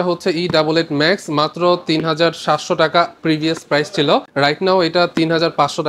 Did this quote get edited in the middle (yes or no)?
yes